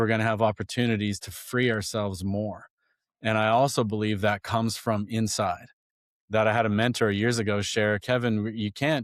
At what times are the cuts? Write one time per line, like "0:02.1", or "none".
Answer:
none

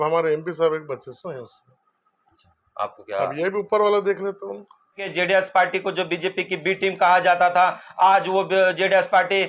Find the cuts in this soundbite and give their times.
0:05.0

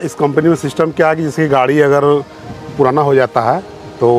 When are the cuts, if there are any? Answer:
none

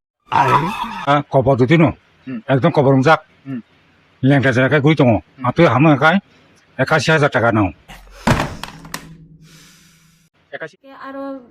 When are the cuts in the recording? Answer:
0:10.4

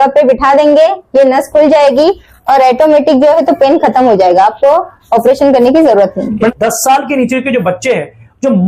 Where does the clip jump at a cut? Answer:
0:06.5

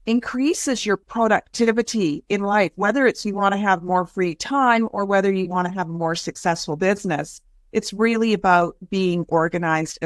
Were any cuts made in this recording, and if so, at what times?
none

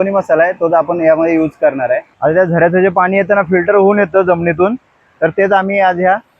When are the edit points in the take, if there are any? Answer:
0:02.1

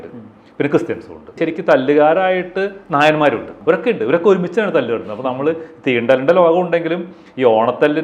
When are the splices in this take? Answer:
0:01.4
0:03.5

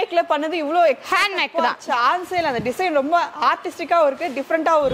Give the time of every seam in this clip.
none

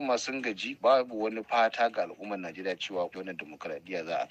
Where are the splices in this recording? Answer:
0:03.1

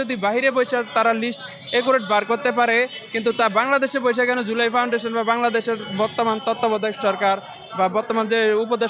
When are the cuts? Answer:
none

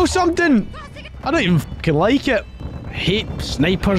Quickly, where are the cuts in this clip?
0:02.5

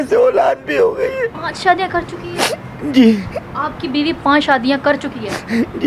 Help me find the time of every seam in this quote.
none

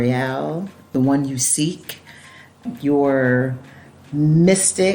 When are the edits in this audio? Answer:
0:00.9
0:02.6

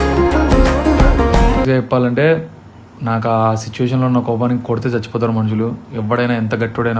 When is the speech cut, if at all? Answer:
0:01.7

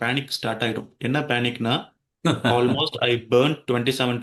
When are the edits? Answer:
none

